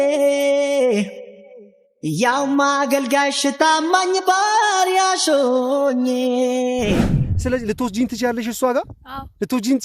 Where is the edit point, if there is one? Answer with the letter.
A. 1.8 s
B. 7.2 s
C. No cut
B